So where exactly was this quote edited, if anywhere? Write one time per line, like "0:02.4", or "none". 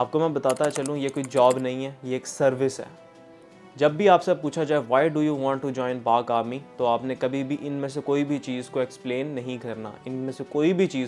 none